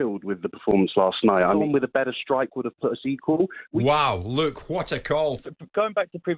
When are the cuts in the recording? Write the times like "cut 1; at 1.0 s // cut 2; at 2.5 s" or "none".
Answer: cut 1; at 1.6 s // cut 2; at 3.6 s // cut 3; at 5.4 s